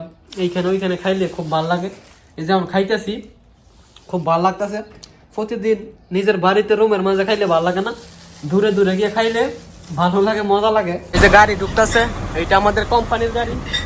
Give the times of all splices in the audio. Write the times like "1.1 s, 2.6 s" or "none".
11.0 s